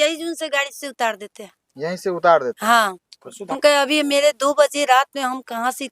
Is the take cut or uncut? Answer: cut